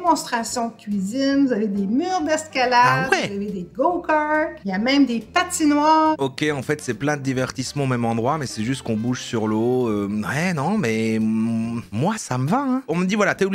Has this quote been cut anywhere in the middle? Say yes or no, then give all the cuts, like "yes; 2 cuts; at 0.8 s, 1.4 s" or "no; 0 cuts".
yes; 2 cuts; at 4.6 s, 6.2 s